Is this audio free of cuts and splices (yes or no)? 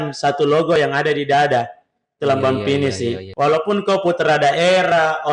no